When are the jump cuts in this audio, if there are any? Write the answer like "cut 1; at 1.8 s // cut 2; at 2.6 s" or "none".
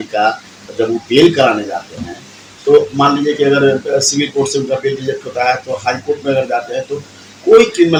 none